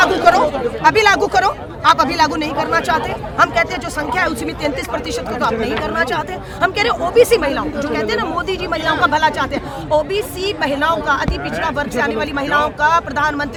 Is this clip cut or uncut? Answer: uncut